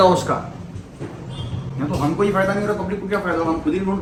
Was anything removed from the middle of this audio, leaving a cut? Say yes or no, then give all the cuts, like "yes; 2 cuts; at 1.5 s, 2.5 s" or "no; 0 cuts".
no; 0 cuts